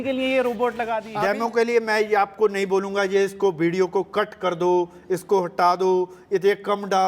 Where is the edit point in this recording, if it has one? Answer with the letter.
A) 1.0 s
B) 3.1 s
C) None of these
A